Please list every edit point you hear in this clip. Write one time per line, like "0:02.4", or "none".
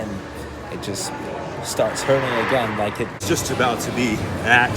0:03.2